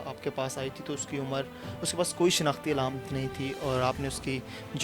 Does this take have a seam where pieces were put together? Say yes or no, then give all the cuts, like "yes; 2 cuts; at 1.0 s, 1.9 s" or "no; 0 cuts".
no; 0 cuts